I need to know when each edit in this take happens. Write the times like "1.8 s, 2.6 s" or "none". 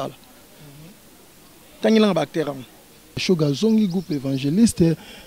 3.2 s